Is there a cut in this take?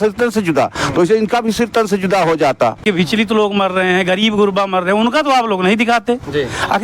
yes; 1 cut; at 2.8 s

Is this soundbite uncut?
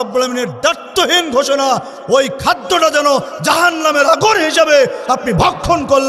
yes; 0 cuts

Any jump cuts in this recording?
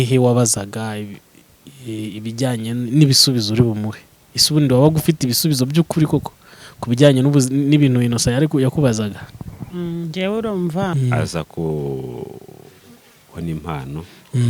yes; 1 cut; at 10.9 s

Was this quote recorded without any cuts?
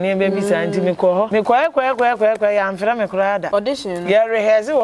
no; 2 cuts; at 1.3 s, 3.4 s

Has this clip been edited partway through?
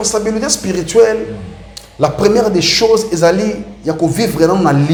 no; 0 cuts

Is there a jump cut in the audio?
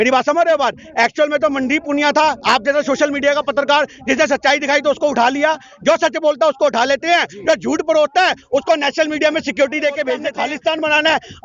yes; 1 cut; at 10.3 s

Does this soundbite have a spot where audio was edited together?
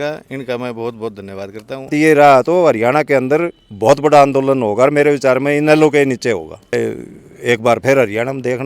yes; 2 cuts; at 1.9 s, 6.7 s

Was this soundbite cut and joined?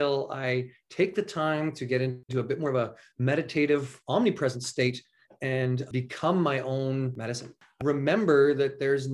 yes; 3 cuts; at 2.2 s, 5.9 s, 7.8 s

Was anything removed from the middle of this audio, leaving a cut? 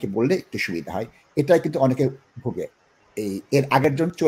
no; 0 cuts

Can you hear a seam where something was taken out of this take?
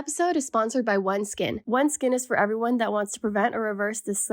yes; 1 cut; at 1.6 s

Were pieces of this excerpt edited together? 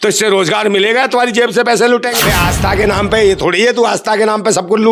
yes; 1 cut; at 2.1 s

